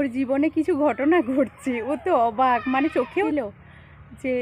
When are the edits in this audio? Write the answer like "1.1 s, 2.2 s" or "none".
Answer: 3.2 s